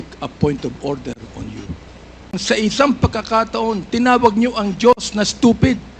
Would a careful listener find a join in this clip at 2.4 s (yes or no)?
yes